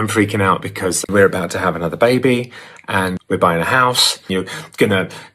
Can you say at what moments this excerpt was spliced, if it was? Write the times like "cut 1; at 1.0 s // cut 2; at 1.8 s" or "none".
cut 1; at 1.0 s // cut 2; at 3.1 s // cut 3; at 4.3 s